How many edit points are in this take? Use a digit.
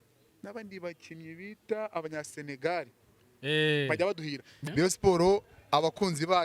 1